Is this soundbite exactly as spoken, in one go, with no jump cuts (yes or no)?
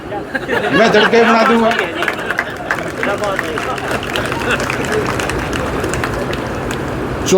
yes